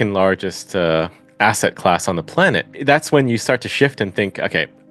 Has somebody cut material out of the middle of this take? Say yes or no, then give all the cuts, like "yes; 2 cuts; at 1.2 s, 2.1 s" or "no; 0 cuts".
yes; 1 cut; at 2.7 s